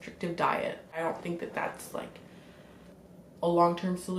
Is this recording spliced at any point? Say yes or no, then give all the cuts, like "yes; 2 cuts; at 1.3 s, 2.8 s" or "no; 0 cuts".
yes; 2 cuts; at 1.0 s, 2.9 s